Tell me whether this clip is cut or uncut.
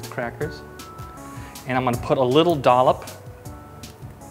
uncut